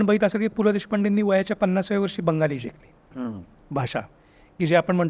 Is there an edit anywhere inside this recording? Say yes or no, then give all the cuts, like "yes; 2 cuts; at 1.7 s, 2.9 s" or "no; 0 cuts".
no; 0 cuts